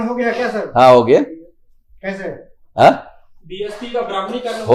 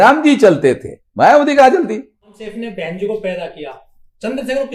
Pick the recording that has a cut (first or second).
second